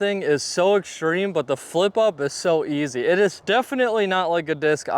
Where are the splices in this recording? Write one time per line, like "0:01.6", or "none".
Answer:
0:03.4